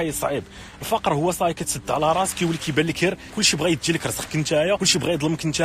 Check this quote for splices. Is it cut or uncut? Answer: cut